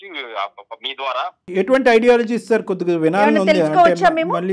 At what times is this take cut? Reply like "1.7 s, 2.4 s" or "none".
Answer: 1.4 s